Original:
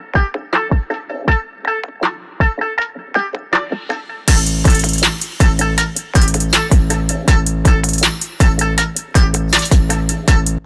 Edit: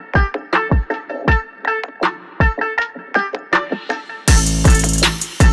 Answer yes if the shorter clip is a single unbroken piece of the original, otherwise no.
yes